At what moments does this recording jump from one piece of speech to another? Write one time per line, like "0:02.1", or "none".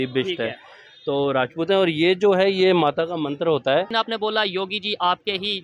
0:03.9